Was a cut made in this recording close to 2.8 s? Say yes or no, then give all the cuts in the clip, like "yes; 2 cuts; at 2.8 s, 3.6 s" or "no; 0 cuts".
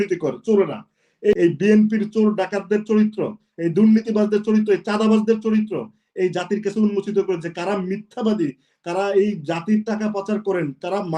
no; 1 cut; at 1.3 s